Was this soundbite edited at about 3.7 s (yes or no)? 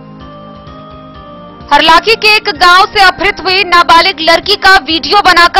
no